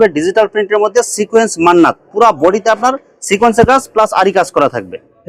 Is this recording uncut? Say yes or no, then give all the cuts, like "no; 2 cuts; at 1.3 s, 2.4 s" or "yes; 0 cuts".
yes; 0 cuts